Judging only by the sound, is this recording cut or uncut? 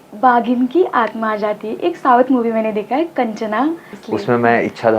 cut